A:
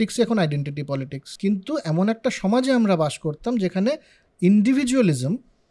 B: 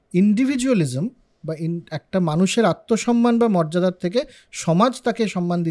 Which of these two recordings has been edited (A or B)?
A